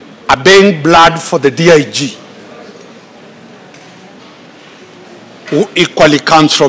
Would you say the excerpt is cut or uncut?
uncut